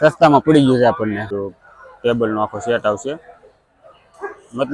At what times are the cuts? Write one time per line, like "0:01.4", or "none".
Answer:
0:01.3